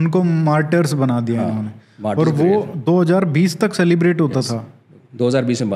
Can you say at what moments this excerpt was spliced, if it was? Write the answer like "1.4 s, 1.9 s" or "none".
none